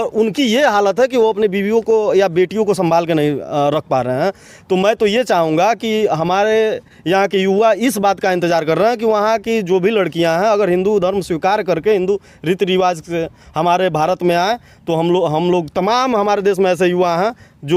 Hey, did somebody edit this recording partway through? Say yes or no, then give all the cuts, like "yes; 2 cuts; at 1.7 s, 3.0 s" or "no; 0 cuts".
no; 0 cuts